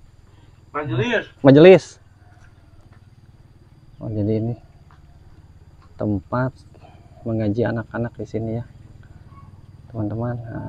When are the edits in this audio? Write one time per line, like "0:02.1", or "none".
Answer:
0:02.8